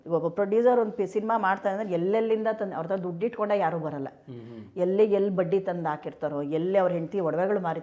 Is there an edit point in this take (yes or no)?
no